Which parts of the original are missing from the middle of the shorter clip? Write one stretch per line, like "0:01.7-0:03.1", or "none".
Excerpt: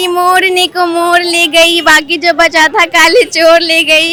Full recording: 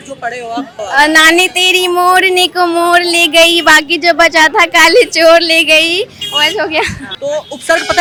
none